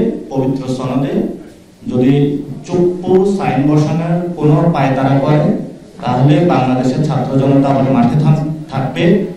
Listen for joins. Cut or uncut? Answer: uncut